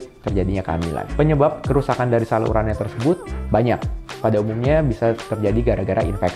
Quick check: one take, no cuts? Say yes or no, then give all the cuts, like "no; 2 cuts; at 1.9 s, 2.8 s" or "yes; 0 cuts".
yes; 0 cuts